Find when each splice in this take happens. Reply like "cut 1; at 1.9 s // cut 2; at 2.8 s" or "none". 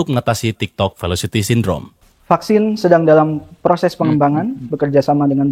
none